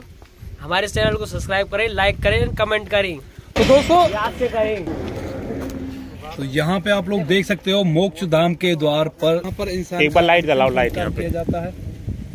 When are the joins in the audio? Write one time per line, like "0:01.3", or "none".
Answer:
0:04.9
0:09.5